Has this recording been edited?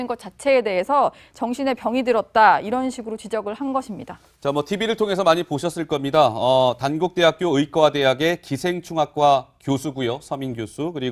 yes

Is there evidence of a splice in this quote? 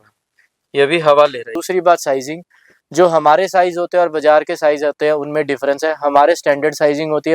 yes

